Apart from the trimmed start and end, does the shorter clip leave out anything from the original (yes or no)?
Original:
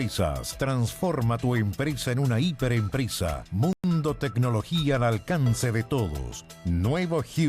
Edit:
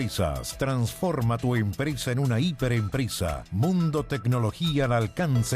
yes